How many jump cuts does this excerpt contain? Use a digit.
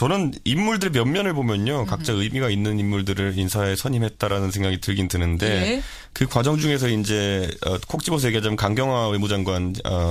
0